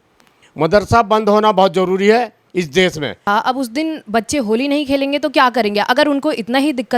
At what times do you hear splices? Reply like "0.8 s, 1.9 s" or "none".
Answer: none